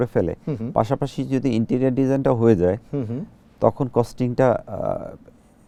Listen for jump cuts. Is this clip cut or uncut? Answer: uncut